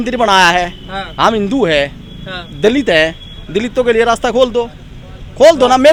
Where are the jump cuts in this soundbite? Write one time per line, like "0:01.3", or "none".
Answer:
none